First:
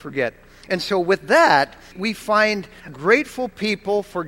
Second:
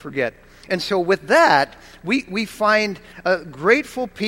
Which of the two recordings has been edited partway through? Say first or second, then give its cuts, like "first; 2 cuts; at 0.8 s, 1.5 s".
first; 2 cuts; at 2.0 s, 2.9 s